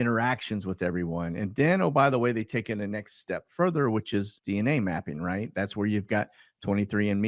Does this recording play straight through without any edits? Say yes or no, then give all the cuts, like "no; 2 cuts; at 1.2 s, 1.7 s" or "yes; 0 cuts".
no; 1 cut; at 4.4 s